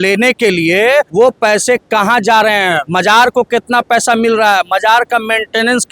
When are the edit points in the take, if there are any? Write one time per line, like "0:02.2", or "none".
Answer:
0:01.1
0:02.8